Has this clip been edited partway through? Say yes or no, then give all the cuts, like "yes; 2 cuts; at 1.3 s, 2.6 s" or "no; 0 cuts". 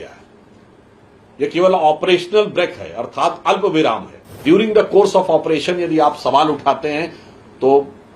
yes; 1 cut; at 4.4 s